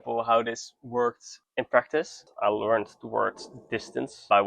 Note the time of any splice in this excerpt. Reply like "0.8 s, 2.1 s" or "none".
2.3 s